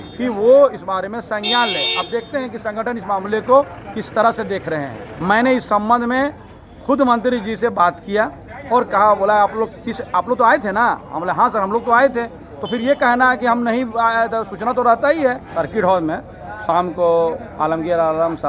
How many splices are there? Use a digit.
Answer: 2